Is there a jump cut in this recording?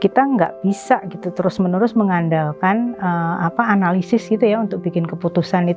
no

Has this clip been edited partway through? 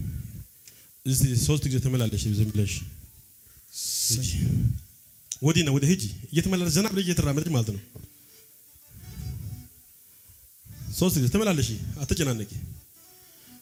no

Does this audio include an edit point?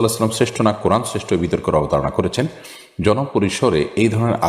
no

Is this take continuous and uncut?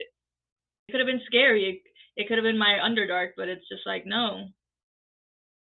yes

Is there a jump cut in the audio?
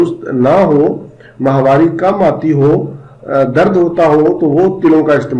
no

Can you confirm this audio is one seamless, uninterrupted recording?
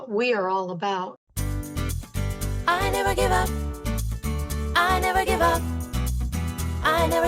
no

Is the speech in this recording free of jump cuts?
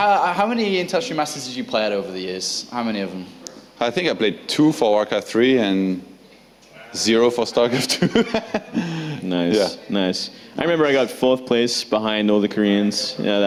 yes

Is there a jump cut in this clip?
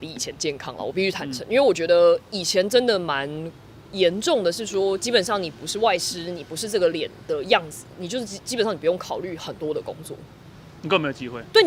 no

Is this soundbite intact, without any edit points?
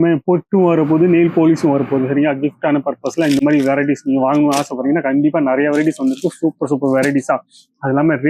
yes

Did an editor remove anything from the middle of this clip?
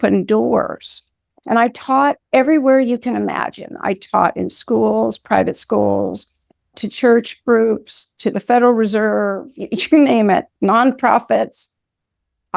yes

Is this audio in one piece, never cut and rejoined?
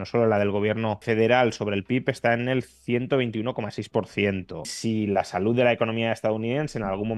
no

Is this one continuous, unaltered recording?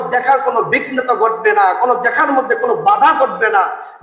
yes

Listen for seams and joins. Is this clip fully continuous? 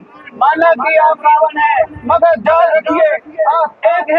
yes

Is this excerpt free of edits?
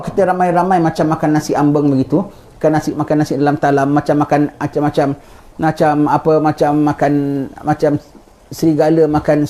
yes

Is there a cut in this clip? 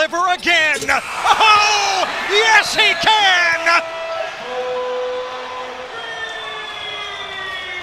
no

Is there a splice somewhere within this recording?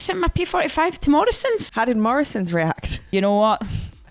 yes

